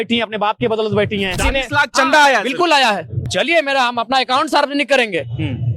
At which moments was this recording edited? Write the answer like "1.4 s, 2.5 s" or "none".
1.4 s, 3.2 s